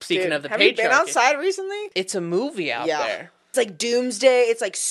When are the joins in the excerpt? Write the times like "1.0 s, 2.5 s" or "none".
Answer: 1.9 s, 3.5 s